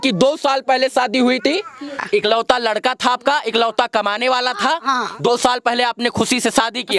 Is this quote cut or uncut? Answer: cut